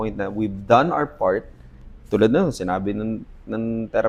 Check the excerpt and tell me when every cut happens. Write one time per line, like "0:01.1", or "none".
none